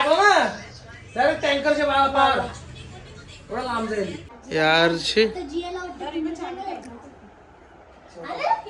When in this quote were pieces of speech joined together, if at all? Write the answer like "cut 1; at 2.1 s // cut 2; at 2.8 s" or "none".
cut 1; at 4.3 s

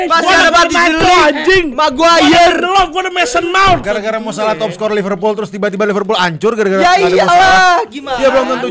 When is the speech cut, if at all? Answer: cut 1; at 3.8 s

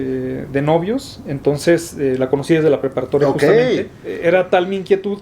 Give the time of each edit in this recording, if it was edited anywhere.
cut 1; at 4.0 s

